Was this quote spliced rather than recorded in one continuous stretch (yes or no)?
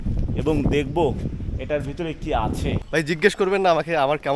yes